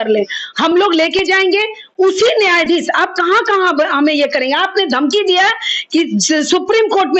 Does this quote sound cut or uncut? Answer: uncut